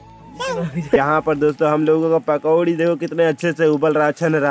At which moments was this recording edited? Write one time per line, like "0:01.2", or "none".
0:01.0